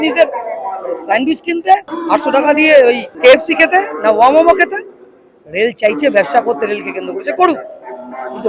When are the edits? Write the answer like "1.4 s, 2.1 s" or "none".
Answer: 2.0 s, 3.1 s